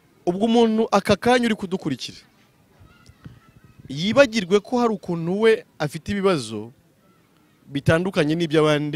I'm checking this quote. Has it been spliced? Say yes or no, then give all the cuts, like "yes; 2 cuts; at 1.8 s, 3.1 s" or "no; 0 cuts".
no; 0 cuts